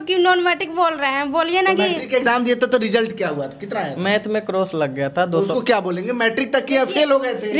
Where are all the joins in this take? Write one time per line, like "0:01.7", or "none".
none